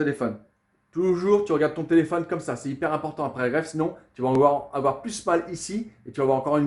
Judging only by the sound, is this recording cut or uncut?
uncut